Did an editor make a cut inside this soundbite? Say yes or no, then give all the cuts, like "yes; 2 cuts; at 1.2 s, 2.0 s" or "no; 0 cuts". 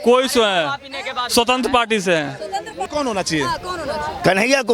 yes; 1 cut; at 2.9 s